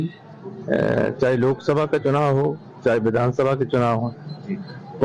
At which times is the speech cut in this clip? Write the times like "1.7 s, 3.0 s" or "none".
none